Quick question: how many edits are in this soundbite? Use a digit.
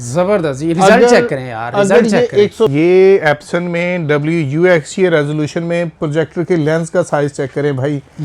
1